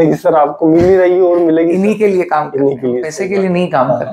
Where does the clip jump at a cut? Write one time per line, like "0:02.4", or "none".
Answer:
0:03.2